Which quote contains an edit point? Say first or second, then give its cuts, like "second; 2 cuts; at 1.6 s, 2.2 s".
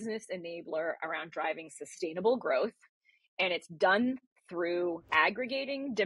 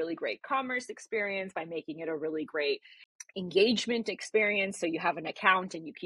first; 1 cut; at 5.0 s